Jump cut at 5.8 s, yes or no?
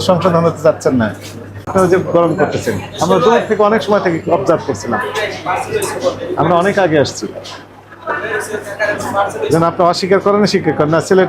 no